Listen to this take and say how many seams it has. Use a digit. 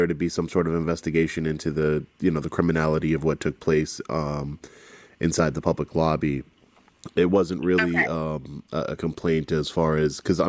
0